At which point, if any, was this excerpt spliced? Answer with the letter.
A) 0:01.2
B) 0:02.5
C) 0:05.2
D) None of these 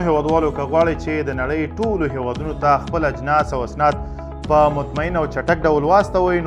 D